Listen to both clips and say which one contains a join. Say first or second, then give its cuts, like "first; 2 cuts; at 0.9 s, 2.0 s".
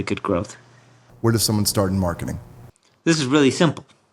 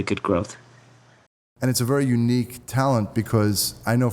first; 1 cut; at 1.1 s